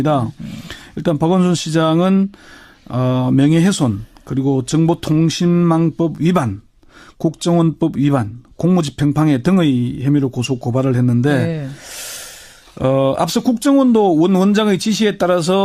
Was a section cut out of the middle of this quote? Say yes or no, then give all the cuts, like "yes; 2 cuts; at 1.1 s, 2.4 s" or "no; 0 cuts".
no; 0 cuts